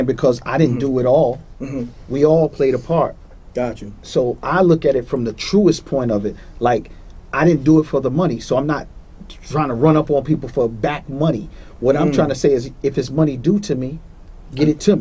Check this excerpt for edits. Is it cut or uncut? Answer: uncut